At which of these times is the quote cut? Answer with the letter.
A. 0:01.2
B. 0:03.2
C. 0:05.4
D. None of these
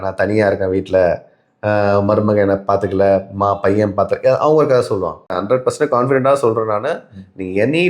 C